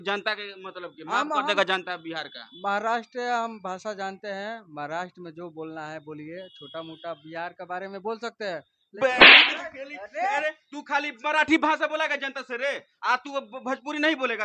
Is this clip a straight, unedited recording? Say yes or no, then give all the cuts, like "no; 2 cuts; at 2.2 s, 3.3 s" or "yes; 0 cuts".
no; 2 cuts; at 9.2 s, 10.0 s